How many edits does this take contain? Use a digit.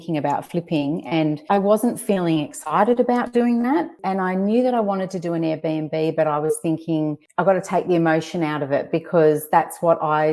2